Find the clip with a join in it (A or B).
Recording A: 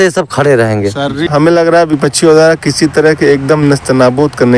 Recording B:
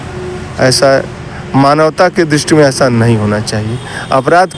A